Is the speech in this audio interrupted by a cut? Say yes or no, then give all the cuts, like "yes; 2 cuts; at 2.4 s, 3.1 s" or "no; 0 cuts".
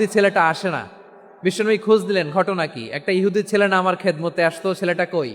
no; 0 cuts